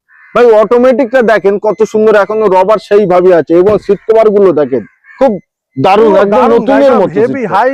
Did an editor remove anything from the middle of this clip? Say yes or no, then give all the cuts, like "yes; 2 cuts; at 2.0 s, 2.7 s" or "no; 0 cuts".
no; 0 cuts